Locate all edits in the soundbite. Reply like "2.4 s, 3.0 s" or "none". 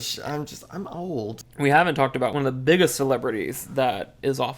1.3 s, 2.3 s